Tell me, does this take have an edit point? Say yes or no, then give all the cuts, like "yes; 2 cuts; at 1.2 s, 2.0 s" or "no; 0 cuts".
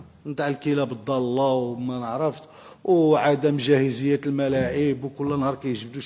no; 0 cuts